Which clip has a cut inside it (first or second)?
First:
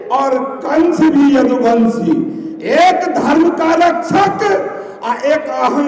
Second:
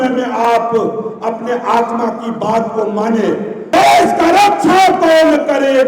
second